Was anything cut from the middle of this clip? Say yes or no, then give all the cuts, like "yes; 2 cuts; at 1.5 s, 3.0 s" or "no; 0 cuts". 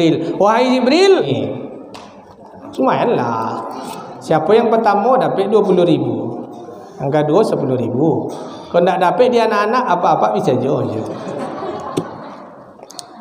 yes; 1 cut; at 1.3 s